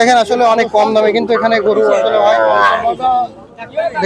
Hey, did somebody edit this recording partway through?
no; 0 cuts

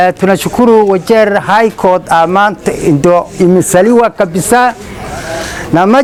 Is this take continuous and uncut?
yes; 0 cuts

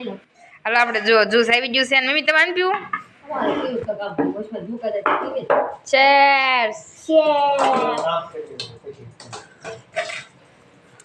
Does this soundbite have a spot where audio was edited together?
no; 0 cuts

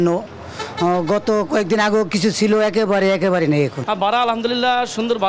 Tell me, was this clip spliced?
yes; 1 cut; at 3.8 s

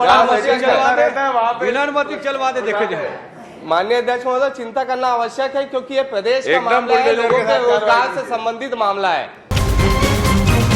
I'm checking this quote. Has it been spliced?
yes; 1 cut; at 9.4 s

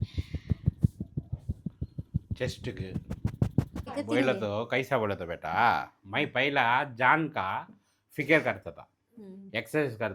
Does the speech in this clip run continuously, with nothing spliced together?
no; 1 cut; at 3.9 s

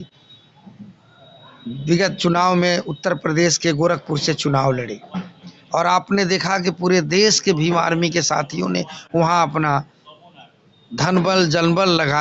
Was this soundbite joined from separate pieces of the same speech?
no; 0 cuts

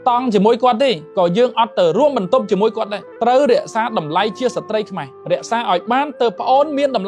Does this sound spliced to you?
no; 0 cuts

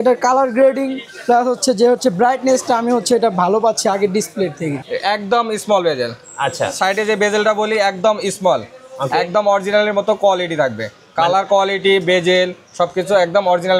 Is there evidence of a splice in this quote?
yes; 1 cut; at 4.8 s

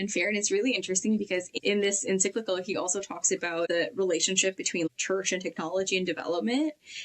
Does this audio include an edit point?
yes; 3 cuts; at 1.5 s, 3.7 s, 4.9 s

